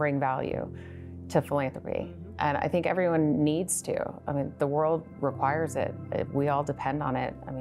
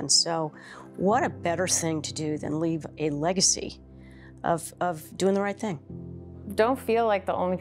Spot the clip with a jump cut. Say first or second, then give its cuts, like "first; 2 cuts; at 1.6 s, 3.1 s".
second; 1 cut; at 6.2 s